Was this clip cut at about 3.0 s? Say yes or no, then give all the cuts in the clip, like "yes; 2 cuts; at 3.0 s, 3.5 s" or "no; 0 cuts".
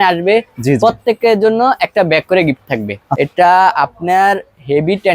yes; 1 cut; at 3.0 s